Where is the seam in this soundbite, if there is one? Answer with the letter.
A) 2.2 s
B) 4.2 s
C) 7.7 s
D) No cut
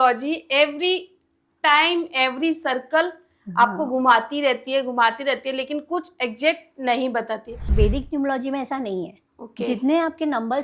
C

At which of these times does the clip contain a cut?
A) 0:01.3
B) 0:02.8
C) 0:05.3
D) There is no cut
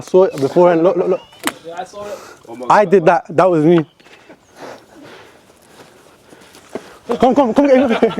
A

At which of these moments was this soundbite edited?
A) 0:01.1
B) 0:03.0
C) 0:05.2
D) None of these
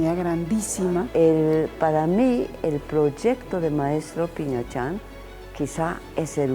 A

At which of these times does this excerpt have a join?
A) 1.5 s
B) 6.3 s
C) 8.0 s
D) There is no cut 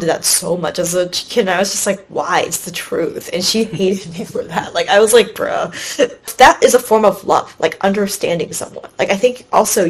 B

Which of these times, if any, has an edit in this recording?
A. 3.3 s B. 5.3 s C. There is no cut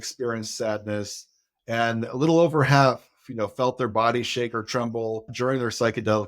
B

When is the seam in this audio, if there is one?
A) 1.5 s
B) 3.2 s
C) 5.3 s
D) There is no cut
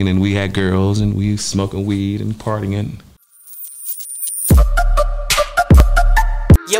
B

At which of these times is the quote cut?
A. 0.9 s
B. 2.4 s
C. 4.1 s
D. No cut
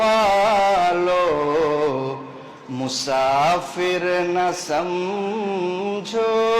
D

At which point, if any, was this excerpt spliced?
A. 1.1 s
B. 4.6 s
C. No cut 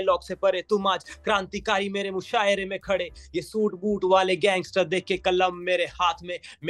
C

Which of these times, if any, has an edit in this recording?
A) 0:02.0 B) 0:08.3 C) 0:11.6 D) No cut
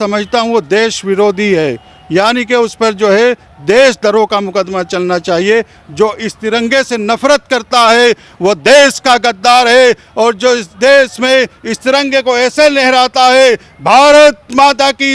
D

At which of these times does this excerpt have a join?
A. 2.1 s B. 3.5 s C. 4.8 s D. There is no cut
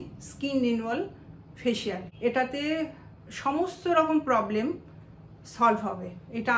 A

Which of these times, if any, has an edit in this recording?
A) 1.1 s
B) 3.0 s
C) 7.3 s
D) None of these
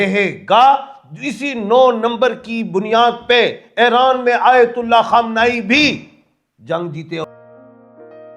C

